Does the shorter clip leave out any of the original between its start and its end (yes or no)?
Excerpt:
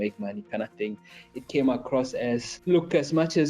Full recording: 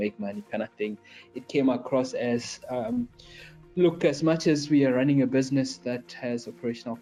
yes